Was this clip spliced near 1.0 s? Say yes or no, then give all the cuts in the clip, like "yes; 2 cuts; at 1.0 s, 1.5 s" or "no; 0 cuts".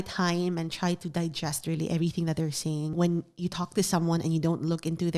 no; 1 cut; at 2.9 s